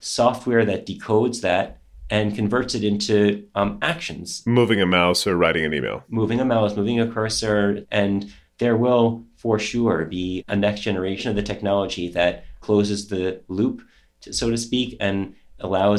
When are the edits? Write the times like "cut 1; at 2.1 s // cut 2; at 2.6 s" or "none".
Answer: cut 1; at 7.8 s // cut 2; at 10.4 s

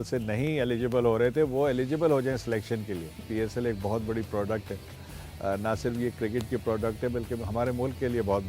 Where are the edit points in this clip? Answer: cut 1; at 3.3 s

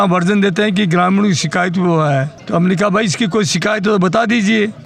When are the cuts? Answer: none

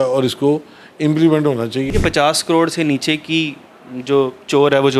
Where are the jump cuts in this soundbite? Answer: cut 1; at 1.9 s

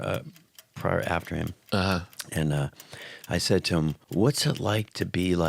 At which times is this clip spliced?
cut 1; at 4.0 s

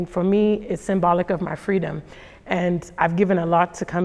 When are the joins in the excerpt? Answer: none

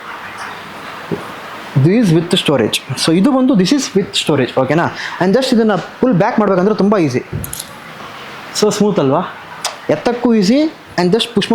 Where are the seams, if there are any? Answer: none

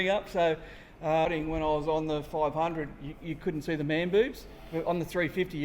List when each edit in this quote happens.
cut 1; at 1.2 s

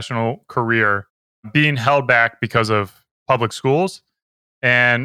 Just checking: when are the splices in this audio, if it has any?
none

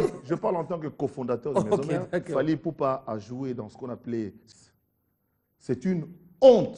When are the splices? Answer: cut 1; at 4.4 s

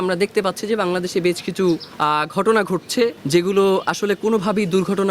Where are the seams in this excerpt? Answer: cut 1; at 1.9 s // cut 2; at 3.2 s

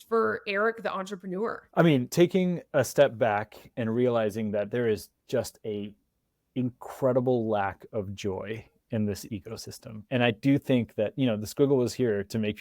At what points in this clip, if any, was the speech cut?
cut 1; at 1.6 s

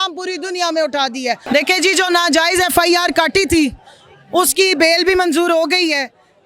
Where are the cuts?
cut 1; at 1.4 s

